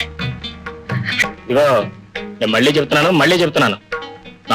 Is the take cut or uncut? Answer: cut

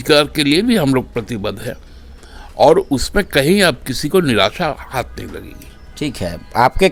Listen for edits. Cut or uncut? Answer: uncut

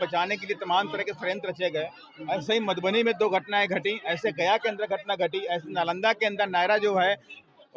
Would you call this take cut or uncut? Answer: uncut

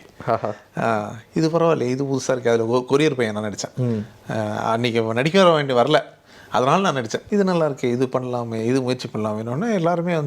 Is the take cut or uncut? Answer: cut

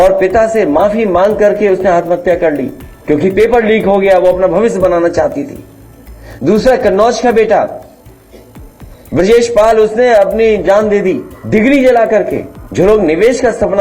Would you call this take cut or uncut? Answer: uncut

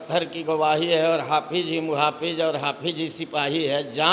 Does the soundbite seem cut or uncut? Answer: uncut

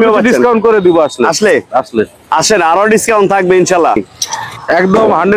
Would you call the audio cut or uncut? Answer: cut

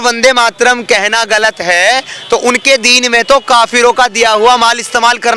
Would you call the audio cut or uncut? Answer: uncut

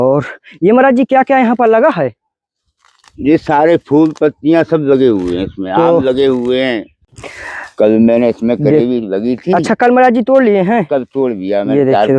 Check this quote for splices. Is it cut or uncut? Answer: cut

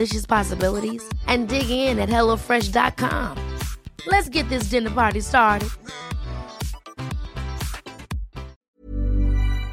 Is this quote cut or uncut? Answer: cut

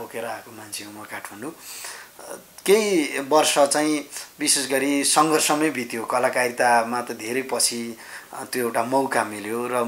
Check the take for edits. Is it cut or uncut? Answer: uncut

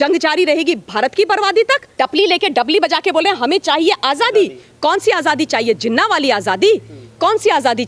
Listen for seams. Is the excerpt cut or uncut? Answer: uncut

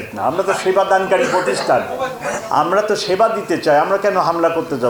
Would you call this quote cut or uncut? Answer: uncut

